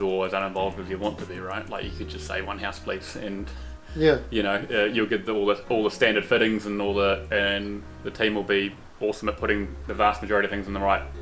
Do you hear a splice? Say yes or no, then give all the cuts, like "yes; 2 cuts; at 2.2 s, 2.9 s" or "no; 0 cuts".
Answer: no; 0 cuts